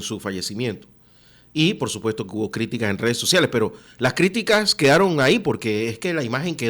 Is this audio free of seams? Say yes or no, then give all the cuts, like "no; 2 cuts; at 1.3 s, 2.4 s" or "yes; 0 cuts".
yes; 0 cuts